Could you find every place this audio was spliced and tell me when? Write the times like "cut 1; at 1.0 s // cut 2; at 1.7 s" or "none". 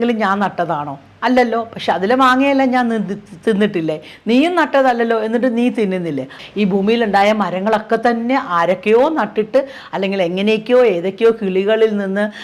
cut 1; at 6.4 s